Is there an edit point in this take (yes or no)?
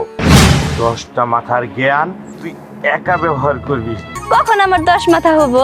yes